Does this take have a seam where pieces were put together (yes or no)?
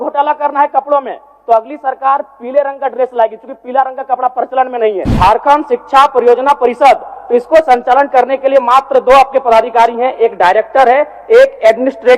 yes